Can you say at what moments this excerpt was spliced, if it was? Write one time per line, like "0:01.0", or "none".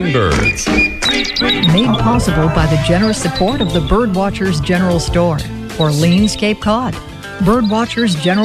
none